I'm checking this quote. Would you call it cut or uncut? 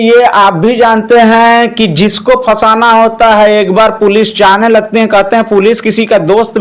uncut